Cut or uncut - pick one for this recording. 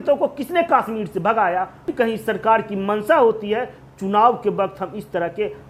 cut